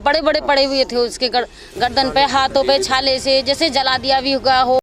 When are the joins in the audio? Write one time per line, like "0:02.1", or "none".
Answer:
none